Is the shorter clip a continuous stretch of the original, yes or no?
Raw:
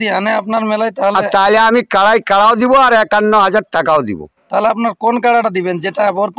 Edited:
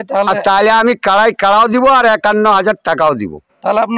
yes